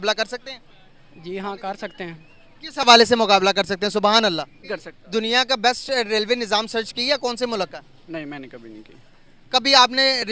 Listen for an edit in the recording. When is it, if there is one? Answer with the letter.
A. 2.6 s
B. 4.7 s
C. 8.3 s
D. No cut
B